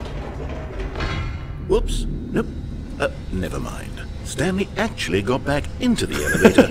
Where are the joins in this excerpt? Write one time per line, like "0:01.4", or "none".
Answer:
none